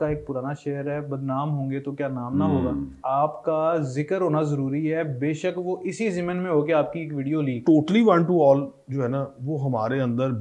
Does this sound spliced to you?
yes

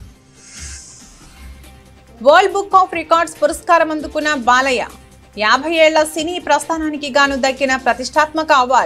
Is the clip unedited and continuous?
yes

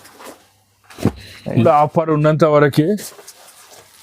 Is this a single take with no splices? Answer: no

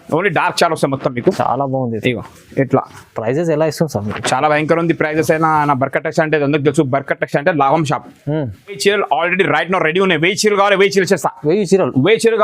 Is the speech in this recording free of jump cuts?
no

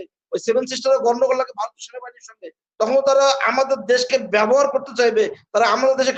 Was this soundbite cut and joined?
no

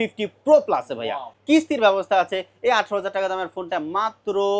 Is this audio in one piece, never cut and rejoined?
no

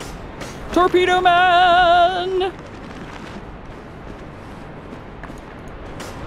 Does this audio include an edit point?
no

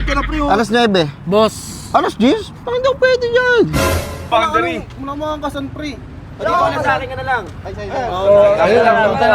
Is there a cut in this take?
yes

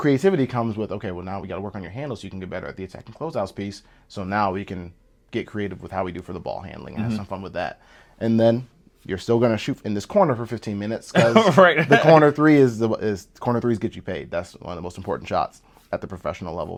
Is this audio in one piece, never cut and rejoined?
yes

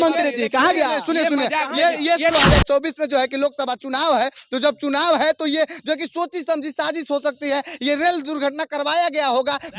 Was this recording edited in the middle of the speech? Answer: yes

